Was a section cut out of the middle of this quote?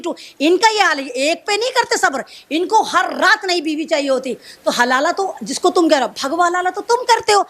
no; 0 cuts

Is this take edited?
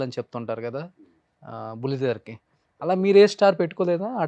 no; 0 cuts

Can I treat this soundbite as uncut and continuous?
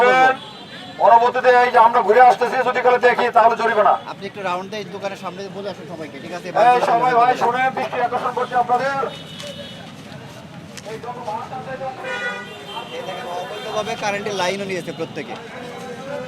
yes; 0 cuts

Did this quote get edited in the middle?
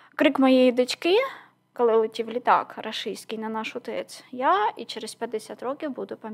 no; 0 cuts

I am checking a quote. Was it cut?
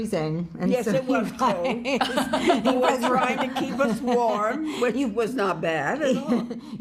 no; 0 cuts

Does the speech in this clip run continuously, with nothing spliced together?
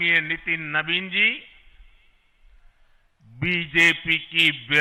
yes; 0 cuts

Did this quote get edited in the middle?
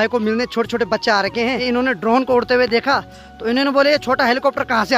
yes; 1 cut; at 1.6 s

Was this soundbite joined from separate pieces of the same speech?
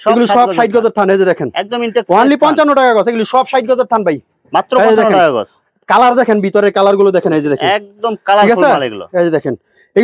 no; 0 cuts

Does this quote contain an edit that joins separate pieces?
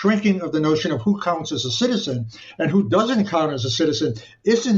no; 0 cuts

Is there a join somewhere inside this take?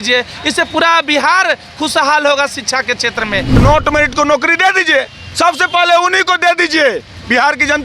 yes; 1 cut; at 3.6 s

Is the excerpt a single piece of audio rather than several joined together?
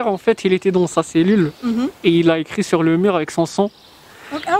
yes; 0 cuts

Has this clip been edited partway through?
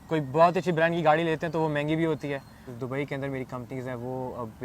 yes; 1 cut; at 2.7 s

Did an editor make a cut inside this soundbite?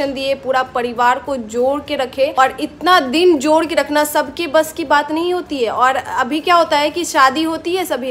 no; 0 cuts

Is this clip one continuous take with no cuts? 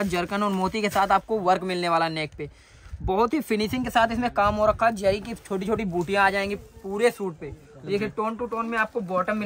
yes; 0 cuts

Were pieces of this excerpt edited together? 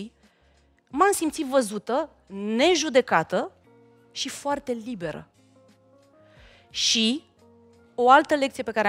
no; 0 cuts

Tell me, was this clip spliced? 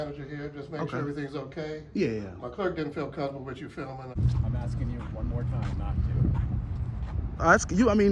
yes; 1 cut; at 4.1 s

